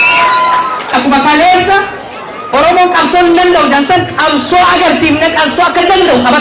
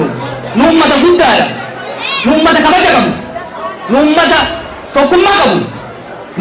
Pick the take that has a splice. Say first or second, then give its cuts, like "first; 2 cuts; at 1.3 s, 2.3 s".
first; 1 cut; at 0.9 s